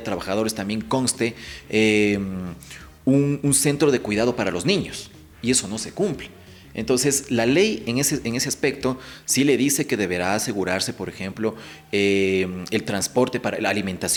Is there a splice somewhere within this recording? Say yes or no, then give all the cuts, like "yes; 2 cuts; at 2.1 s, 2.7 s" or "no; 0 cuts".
no; 0 cuts